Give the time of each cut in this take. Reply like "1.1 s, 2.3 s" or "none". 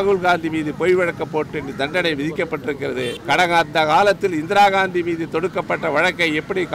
3.2 s